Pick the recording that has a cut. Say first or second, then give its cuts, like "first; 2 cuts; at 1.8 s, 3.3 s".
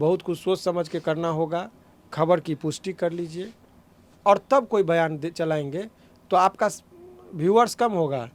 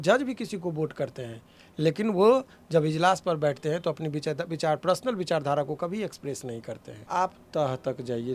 second; 1 cut; at 7.0 s